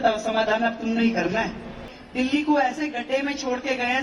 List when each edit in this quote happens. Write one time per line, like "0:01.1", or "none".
0:01.9